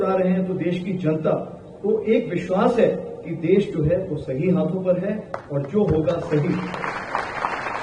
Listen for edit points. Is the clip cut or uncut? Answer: uncut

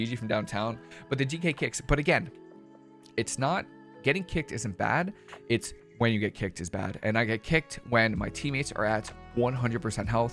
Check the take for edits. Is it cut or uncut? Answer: uncut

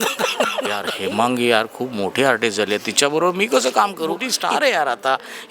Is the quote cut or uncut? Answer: cut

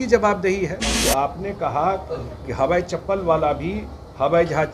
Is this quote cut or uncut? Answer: cut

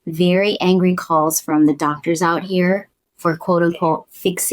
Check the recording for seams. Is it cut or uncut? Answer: uncut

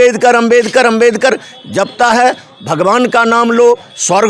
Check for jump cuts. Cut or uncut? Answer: uncut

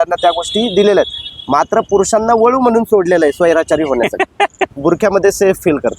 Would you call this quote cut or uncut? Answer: cut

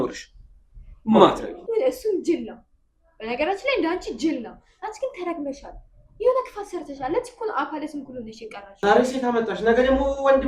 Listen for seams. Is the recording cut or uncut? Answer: cut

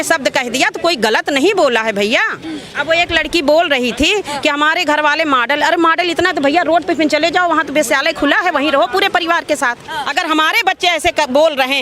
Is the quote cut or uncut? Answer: cut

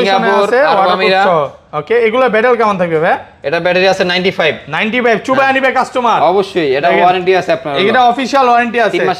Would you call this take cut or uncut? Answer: uncut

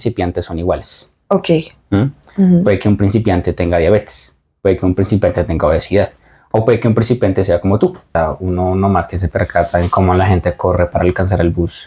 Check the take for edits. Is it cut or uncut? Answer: cut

